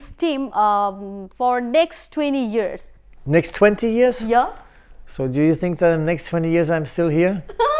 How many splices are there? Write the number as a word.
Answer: zero